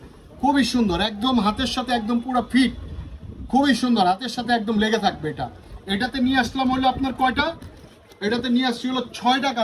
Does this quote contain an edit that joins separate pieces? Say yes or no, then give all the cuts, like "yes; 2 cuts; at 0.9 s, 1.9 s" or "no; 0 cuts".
no; 0 cuts